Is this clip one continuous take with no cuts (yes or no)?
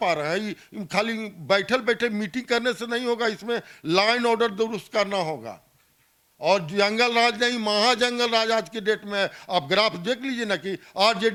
yes